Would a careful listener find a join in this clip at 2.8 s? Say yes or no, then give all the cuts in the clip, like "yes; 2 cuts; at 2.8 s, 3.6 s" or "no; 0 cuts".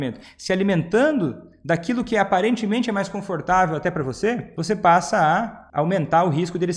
no; 2 cuts; at 4.5 s, 5.6 s